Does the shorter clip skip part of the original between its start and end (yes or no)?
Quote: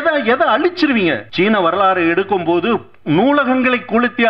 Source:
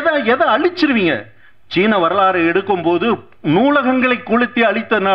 yes